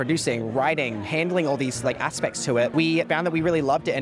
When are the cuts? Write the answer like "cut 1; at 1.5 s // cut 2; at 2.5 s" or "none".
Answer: cut 1; at 3.1 s